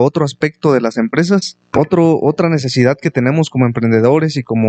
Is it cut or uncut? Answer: cut